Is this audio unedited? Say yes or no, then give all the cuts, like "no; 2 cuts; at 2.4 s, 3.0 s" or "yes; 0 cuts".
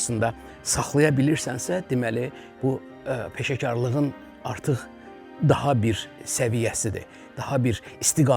yes; 0 cuts